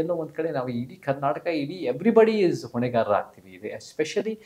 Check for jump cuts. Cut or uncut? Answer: uncut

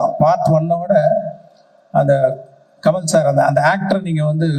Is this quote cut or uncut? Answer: uncut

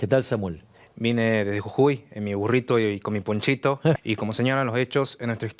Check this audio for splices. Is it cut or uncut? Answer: cut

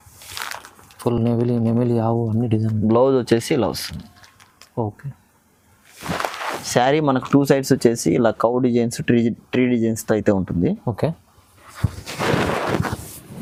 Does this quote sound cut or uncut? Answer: uncut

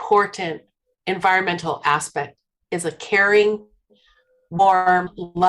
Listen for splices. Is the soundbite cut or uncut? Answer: cut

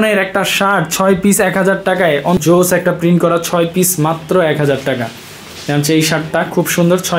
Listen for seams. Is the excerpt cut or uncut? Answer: cut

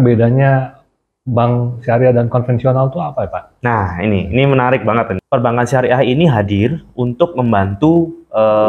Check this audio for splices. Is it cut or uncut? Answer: cut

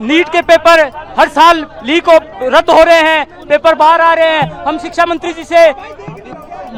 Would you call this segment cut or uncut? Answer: uncut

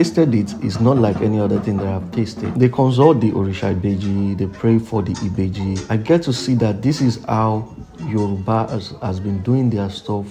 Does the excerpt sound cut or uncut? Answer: uncut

